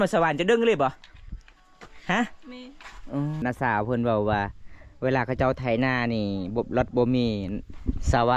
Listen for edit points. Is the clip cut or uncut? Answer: cut